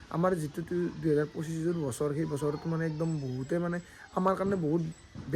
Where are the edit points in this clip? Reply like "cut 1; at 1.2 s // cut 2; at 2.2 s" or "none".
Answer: none